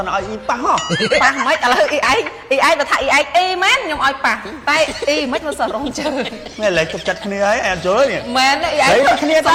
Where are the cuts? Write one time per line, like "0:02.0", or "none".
none